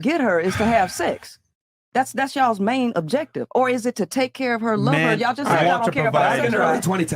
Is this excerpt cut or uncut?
cut